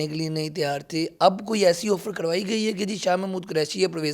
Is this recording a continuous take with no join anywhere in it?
yes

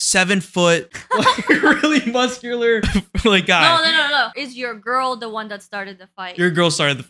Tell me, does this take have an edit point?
yes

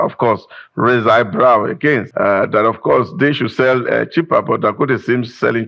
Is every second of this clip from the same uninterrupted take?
no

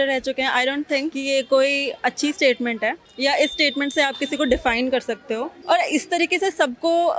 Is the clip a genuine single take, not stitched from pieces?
no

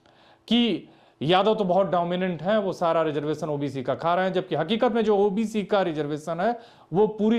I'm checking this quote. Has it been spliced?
no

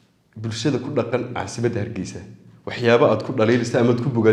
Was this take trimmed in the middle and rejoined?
no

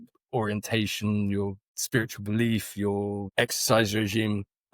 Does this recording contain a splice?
yes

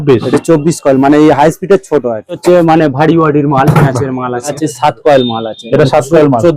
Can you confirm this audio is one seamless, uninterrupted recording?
no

